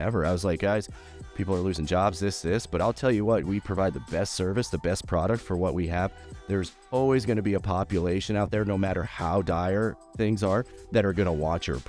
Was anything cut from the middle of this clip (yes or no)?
no